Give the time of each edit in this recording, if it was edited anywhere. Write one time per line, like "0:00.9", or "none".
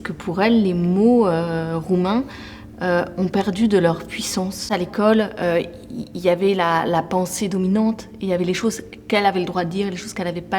0:04.7